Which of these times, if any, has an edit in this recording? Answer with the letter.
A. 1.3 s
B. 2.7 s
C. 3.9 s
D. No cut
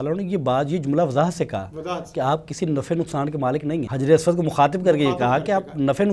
C